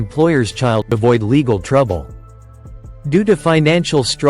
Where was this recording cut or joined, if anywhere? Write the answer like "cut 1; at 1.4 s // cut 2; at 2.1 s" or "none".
cut 1; at 0.9 s